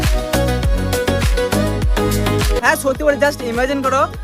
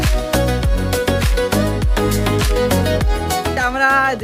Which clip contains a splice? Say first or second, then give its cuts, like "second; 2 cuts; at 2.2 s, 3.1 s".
first; 1 cut; at 2.6 s